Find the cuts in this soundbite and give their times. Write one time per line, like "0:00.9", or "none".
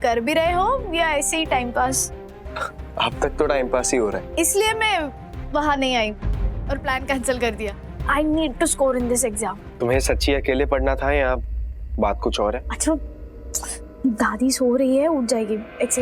0:04.2
0:09.6
0:12.7